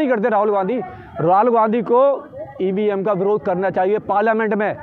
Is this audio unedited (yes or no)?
yes